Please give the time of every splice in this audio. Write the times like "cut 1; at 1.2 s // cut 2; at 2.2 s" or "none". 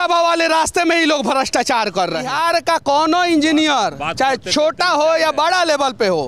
cut 1; at 2.3 s

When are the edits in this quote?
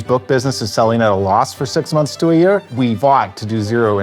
cut 1; at 2.7 s

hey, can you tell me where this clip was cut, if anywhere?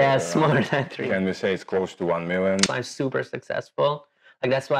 cut 1; at 0.9 s // cut 2; at 2.7 s

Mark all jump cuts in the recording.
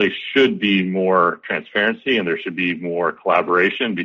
none

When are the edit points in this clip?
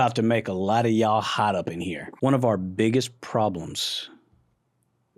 cut 1; at 2.0 s

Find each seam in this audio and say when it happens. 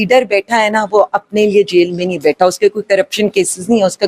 none

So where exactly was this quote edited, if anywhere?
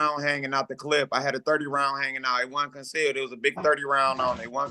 none

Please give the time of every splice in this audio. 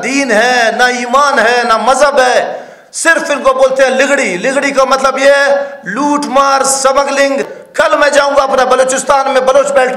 cut 1; at 7.6 s

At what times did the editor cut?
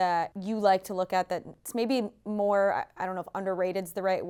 none

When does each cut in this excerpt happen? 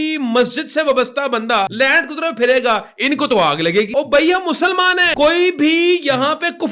cut 1; at 1.7 s // cut 2; at 3.9 s // cut 3; at 5.1 s

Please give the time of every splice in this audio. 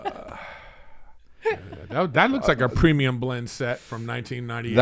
none

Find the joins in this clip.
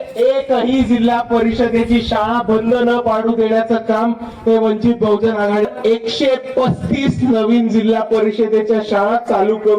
cut 1; at 5.6 s

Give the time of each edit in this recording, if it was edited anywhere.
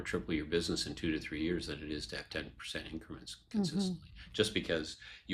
none

